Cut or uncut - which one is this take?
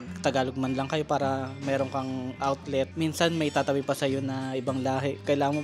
cut